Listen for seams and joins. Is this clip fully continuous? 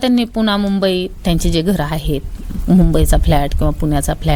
yes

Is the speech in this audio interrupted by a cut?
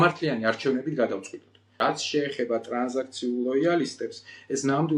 yes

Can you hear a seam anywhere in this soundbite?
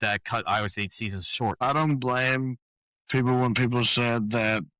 yes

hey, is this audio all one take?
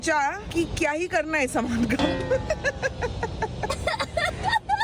no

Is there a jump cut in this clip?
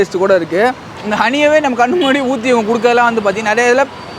yes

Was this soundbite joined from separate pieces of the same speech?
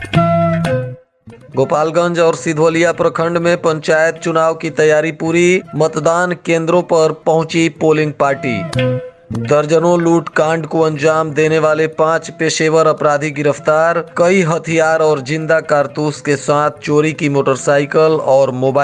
yes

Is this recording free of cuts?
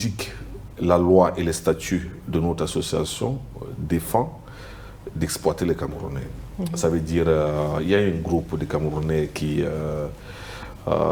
yes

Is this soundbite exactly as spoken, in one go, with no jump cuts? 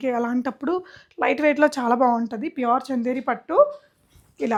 yes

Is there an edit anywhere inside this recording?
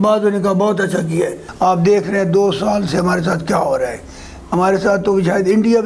yes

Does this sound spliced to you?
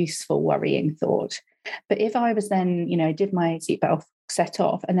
no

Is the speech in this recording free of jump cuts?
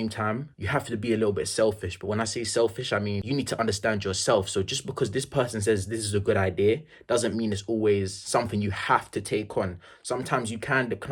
yes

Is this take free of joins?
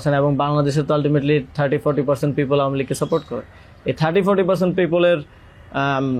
yes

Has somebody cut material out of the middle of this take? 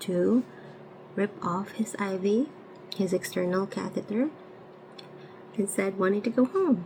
no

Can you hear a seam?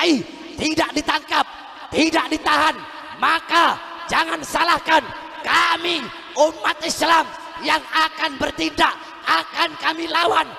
no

